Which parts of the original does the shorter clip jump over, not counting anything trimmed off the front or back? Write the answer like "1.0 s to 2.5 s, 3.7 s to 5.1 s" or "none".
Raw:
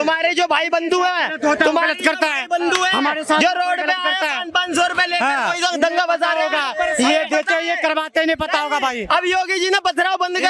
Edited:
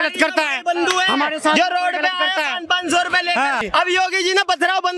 5.5 s to 9.0 s